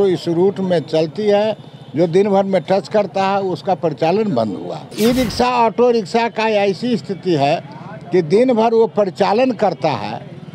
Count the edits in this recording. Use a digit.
1